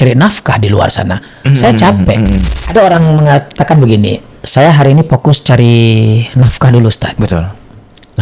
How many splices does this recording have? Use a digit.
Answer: 1